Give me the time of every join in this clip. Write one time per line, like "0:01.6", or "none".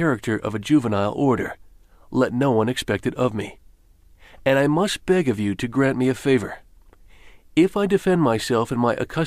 0:07.4